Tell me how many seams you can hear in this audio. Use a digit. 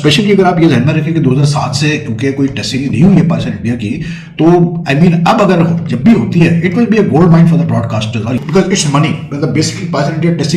1